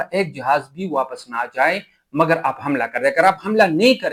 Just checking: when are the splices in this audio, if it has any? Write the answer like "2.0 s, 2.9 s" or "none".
none